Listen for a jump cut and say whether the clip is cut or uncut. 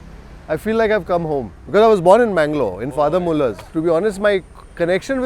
uncut